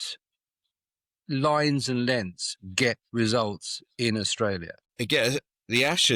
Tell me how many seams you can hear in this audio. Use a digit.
1